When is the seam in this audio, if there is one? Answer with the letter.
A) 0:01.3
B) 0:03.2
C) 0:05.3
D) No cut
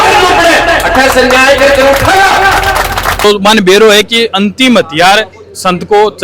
B